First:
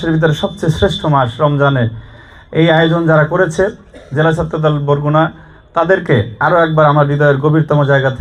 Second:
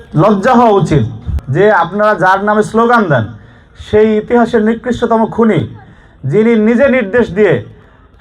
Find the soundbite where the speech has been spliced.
second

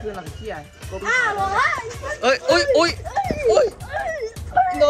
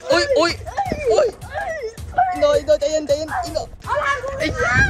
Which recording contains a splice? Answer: second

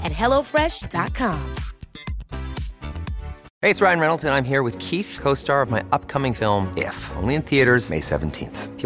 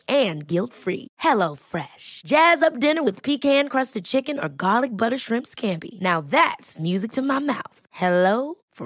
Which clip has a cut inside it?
first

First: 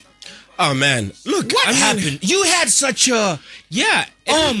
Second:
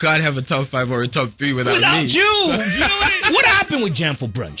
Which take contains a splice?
second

